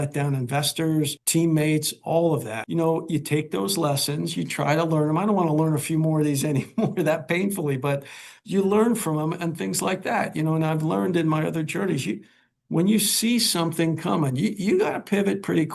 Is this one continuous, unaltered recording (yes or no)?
no